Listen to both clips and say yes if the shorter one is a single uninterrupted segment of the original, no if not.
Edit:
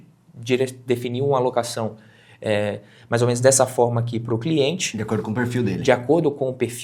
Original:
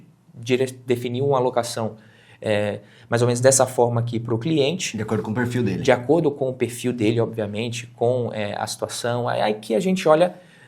yes